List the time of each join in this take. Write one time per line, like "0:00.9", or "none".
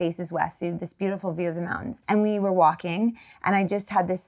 0:01.9